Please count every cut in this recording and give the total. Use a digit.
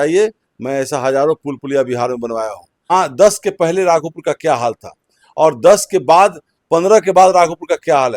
1